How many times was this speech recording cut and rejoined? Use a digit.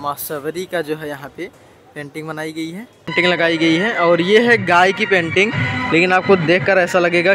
1